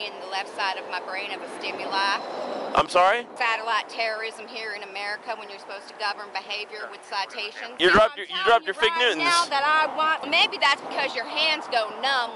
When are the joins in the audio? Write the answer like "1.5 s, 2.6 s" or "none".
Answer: 3.3 s, 7.7 s, 10.2 s